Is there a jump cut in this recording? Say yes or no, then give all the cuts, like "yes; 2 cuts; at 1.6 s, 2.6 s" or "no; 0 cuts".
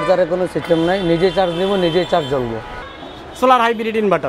yes; 1 cut; at 2.9 s